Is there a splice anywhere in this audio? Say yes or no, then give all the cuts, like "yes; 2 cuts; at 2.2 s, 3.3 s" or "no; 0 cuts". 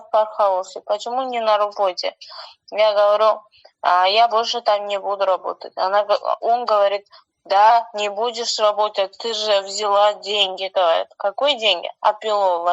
no; 0 cuts